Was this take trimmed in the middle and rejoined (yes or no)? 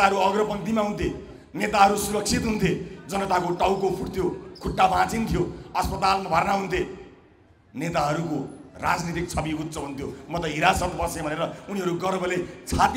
no